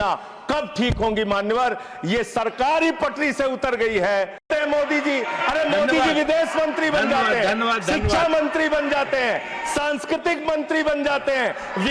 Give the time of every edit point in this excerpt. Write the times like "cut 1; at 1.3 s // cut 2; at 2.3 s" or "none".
cut 1; at 4.5 s